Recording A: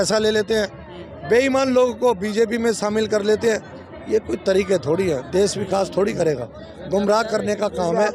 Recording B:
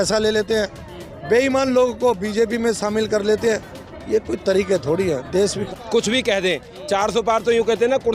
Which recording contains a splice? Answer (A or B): B